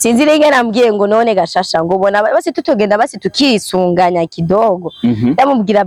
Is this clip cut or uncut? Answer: uncut